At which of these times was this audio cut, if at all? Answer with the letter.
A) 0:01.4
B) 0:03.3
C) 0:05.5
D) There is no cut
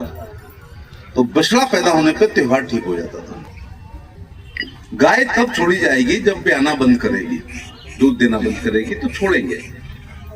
B